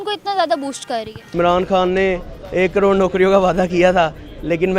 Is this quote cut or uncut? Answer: cut